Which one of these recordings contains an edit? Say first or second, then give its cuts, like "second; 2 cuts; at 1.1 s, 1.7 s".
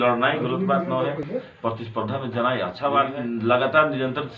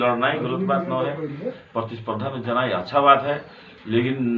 first; 2 cuts; at 1.2 s, 3.2 s